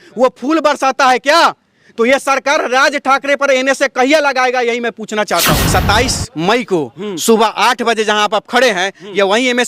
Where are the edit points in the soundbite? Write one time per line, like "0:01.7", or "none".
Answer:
0:05.6